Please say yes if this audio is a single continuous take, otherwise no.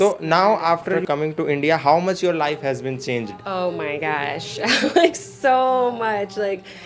no